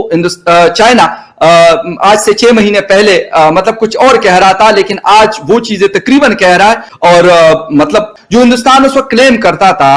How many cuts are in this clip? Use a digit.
2